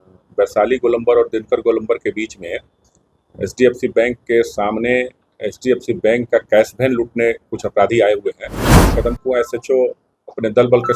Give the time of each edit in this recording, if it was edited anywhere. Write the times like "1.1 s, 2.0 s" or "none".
8.9 s